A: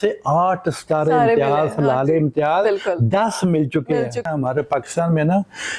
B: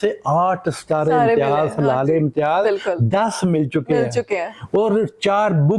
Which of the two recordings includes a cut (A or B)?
A